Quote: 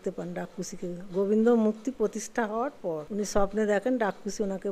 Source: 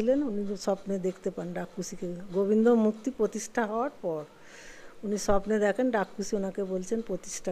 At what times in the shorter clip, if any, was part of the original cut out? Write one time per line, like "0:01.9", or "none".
0:03.1